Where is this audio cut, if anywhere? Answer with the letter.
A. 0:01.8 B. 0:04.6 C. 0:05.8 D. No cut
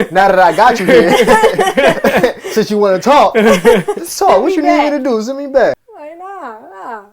C